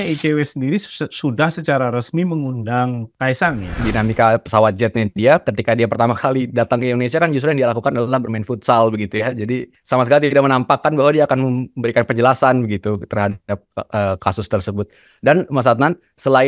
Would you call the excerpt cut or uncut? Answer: cut